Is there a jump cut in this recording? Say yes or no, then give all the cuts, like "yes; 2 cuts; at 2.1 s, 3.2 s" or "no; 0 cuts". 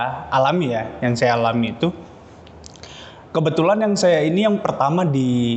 no; 0 cuts